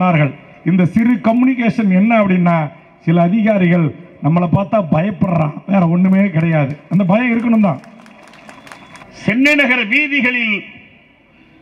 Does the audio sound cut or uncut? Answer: cut